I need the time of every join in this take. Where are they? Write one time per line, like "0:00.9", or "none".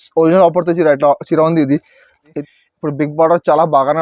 0:02.3